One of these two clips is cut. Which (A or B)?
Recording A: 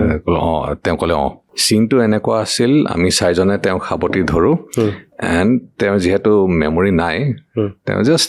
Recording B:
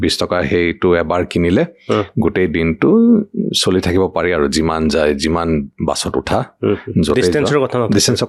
A